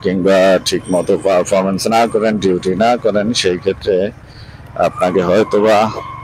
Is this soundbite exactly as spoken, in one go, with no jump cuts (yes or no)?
yes